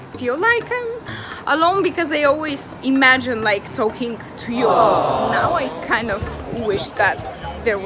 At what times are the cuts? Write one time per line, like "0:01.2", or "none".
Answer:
0:05.5

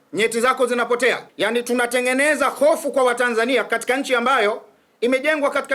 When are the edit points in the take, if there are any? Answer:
0:01.3

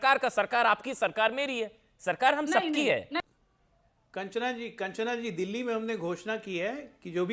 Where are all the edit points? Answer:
0:03.2

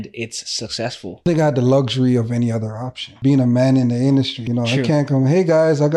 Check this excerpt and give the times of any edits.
0:01.2
0:03.1
0:04.4

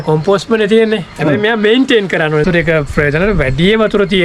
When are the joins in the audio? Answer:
0:02.4

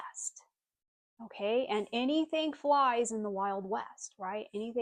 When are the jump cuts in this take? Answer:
none

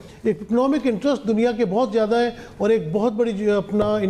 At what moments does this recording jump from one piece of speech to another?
none

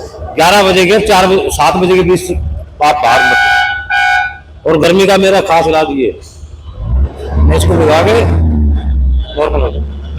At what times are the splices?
none

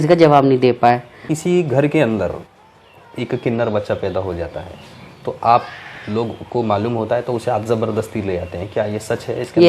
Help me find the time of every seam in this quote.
0:01.3

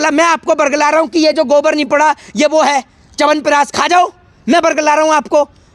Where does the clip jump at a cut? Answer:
none

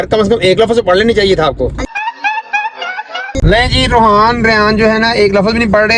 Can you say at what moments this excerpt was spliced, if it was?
none

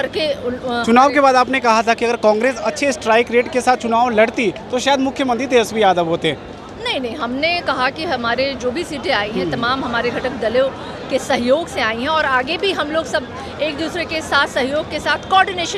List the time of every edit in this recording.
none

